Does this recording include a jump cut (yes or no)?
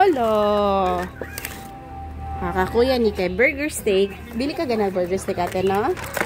no